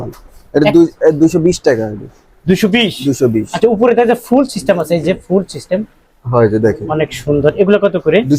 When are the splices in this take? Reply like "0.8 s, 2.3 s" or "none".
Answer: none